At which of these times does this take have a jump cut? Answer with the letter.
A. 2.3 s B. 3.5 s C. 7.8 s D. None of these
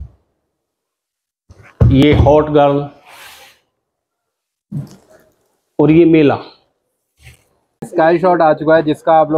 C